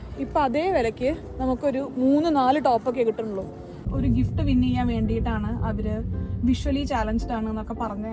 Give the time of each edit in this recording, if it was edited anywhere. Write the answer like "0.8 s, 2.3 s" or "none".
3.8 s